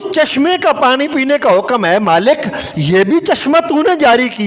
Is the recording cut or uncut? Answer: uncut